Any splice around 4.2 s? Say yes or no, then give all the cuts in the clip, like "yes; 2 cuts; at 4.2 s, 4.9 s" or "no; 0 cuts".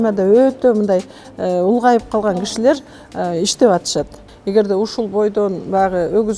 yes; 1 cut; at 4.2 s